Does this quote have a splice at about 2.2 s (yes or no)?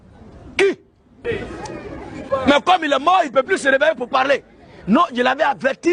yes